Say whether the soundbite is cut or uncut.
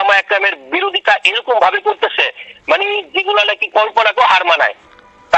uncut